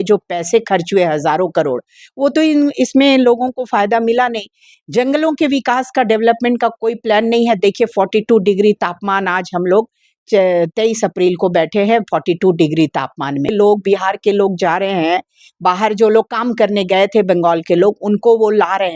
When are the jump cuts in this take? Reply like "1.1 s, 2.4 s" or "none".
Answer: 13.5 s